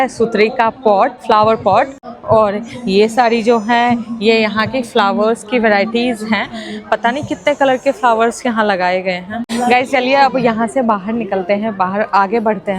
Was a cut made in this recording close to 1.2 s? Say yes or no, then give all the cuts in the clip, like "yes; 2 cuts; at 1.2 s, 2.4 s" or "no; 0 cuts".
no; 0 cuts